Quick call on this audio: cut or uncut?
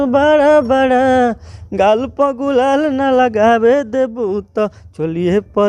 uncut